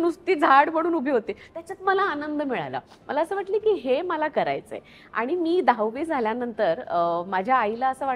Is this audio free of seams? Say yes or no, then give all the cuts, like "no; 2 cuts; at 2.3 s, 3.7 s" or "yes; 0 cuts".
yes; 0 cuts